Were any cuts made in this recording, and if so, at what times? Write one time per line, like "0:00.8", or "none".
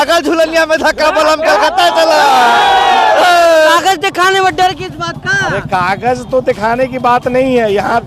0:03.7

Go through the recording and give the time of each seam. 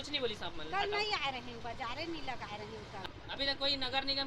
0:03.0

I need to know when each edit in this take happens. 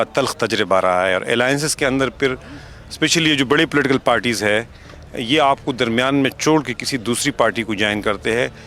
none

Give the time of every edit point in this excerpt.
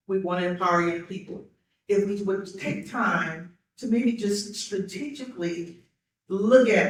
none

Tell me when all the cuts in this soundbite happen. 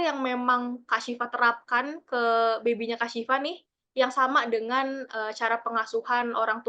none

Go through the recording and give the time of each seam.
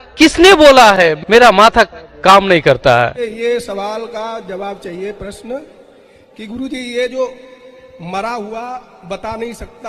0:03.2

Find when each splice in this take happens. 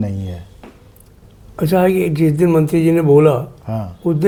none

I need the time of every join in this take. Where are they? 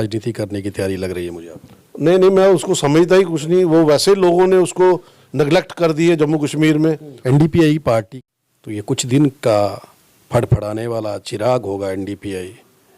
0:07.1
0:08.7

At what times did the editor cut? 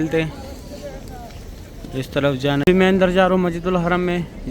0:02.6

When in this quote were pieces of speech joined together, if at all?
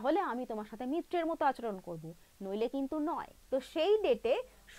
0:03.3

